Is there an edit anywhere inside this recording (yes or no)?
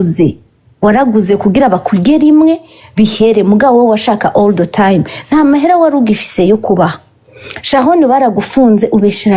no